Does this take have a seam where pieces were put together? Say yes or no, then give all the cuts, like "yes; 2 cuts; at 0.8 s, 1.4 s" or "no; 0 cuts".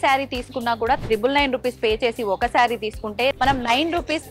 yes; 1 cut; at 3.3 s